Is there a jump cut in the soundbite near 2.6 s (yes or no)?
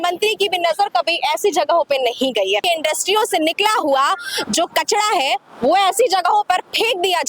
yes